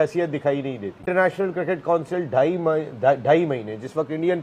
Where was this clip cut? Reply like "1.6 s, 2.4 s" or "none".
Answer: 0.9 s